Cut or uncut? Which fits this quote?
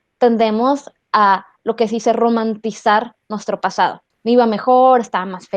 cut